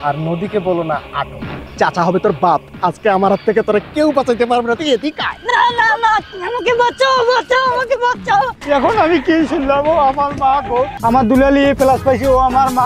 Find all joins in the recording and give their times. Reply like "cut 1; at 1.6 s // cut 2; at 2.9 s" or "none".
cut 1; at 1.7 s // cut 2; at 8.6 s // cut 3; at 10.9 s